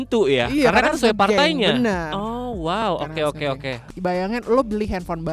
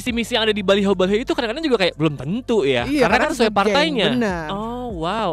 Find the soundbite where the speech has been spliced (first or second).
first